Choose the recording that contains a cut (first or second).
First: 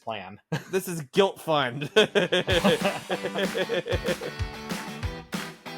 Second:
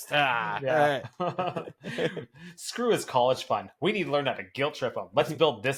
first